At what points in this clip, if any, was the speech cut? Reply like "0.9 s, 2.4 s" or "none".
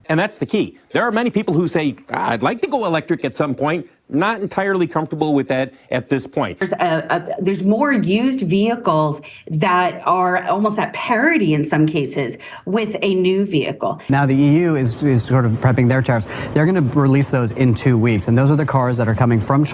6.6 s, 14.0 s